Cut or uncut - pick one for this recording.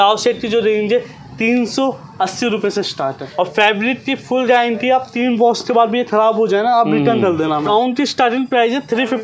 cut